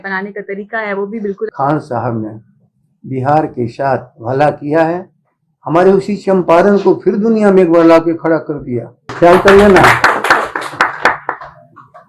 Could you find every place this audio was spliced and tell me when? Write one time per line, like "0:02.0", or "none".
0:01.5
0:09.1